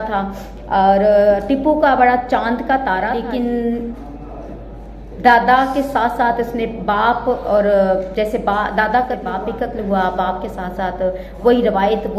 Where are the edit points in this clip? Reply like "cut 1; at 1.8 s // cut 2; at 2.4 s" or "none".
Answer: cut 1; at 3.2 s // cut 2; at 9.3 s